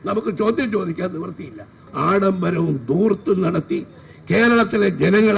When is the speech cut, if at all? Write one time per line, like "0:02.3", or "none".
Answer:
0:01.8